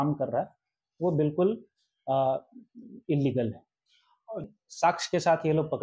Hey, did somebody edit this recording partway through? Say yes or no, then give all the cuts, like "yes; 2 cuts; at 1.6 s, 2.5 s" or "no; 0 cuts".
yes; 1 cut; at 4.4 s